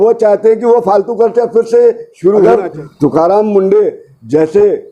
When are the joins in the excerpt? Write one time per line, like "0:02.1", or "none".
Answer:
0:02.4